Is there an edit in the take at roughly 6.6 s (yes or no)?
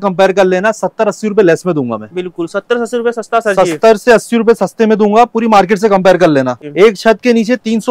yes